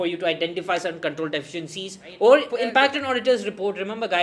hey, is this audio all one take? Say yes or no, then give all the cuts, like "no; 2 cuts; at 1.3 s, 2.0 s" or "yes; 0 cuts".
no; 1 cut; at 2.5 s